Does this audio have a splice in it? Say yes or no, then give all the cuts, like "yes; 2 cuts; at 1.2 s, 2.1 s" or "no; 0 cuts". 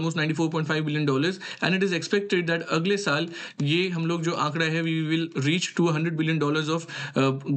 no; 0 cuts